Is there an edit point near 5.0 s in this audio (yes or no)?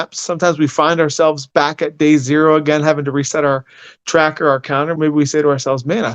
yes